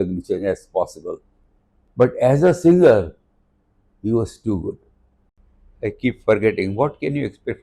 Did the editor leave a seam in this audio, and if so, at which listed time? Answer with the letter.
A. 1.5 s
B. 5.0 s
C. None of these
B